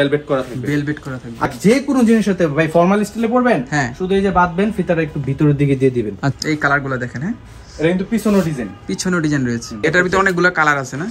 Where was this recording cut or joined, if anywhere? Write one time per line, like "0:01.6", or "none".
0:01.5
0:06.3
0:09.8

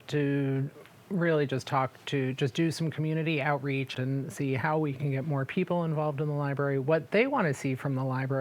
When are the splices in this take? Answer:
0:03.9
0:05.0

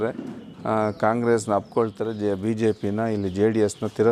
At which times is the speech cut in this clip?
none

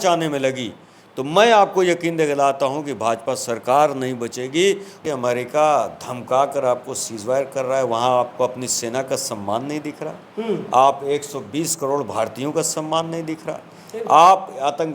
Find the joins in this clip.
0:05.2

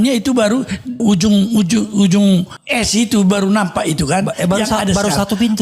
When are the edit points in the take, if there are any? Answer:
0:00.9
0:02.6

